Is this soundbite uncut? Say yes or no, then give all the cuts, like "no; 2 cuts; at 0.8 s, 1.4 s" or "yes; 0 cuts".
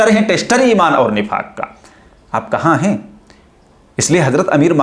yes; 0 cuts